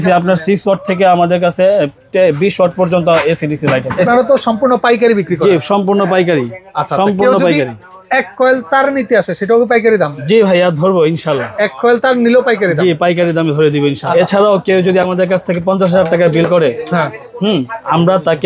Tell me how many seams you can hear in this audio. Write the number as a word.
two